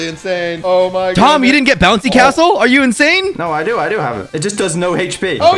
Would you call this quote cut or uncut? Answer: uncut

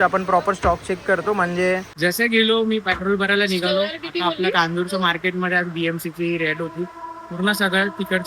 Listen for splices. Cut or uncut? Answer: cut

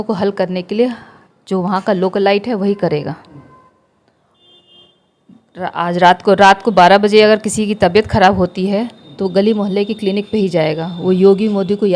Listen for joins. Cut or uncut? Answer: uncut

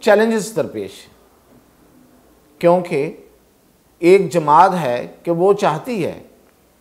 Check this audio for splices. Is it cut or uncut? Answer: uncut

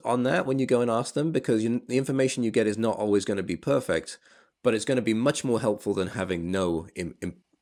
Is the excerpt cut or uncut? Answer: uncut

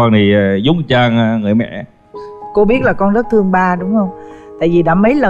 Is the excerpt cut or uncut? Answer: uncut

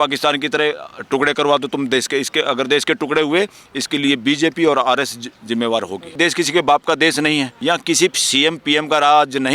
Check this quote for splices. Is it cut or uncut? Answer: cut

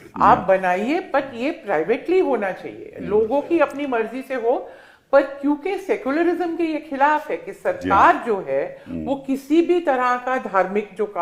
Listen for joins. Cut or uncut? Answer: uncut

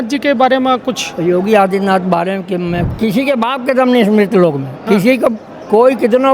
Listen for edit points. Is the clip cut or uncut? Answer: cut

